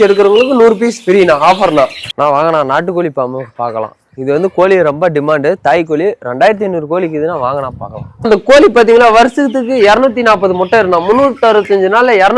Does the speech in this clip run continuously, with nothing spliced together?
no; 2 cuts; at 2.0 s, 8.3 s

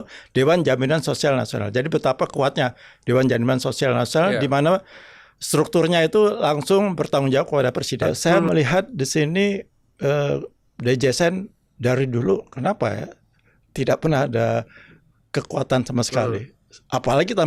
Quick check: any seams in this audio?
yes; 1 cut; at 8.0 s

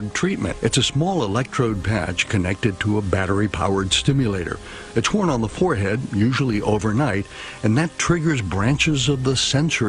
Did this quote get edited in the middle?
no; 0 cuts

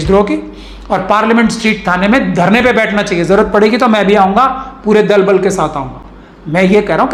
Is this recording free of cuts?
yes; 0 cuts

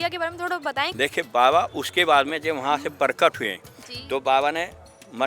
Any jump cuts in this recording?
yes; 1 cut; at 0.9 s

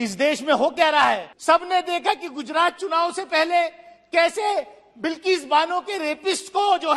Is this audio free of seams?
no; 1 cut; at 1.3 s

